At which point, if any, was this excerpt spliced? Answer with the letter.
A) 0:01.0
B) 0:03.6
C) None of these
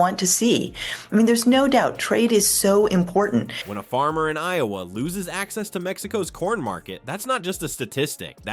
C